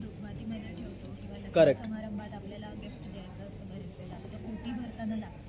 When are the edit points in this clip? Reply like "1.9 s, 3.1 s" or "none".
none